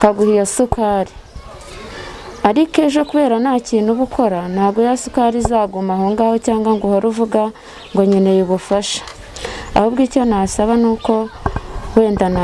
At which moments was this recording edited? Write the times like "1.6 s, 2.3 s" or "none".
none